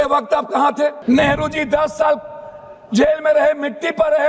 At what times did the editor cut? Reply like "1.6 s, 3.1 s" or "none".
1.0 s